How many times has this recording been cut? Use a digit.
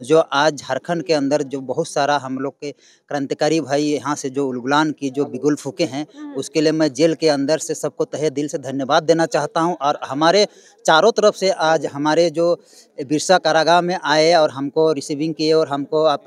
0